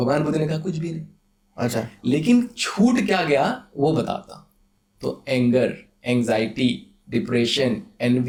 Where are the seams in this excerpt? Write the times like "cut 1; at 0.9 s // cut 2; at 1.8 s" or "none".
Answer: none